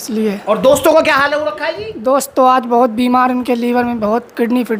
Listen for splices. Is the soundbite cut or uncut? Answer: uncut